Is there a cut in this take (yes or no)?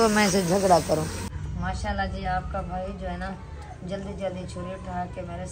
yes